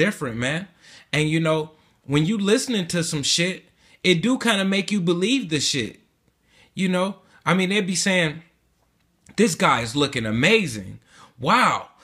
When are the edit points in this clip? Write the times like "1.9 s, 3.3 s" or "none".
6.0 s